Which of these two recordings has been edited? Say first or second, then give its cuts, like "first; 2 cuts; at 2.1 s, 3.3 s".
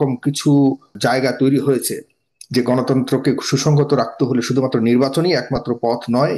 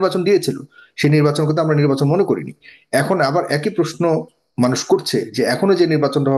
first; 1 cut; at 0.9 s